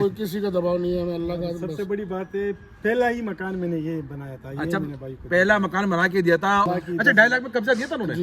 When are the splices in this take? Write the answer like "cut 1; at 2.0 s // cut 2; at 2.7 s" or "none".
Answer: cut 1; at 6.7 s